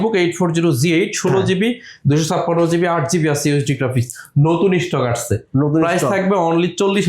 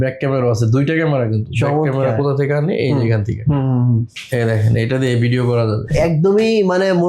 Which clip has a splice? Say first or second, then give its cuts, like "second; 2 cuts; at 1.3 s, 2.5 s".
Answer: second; 1 cut; at 5.9 s